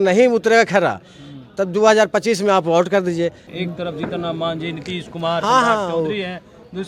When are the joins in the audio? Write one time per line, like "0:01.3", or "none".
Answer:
0:03.4